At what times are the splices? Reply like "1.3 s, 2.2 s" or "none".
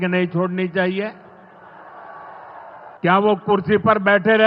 3.0 s